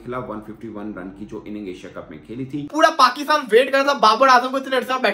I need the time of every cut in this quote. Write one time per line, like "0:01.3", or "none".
0:02.6